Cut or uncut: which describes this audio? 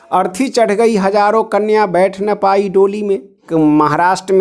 cut